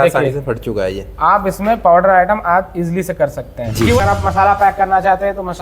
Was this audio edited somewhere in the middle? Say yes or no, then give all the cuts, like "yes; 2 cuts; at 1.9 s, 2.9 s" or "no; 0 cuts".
yes; 1 cut; at 4.0 s